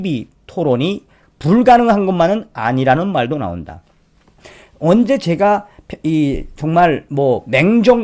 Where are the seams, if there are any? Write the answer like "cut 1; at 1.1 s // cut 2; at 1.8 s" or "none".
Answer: cut 1; at 4.4 s